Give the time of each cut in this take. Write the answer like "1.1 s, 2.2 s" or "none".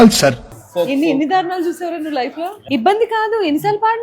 2.4 s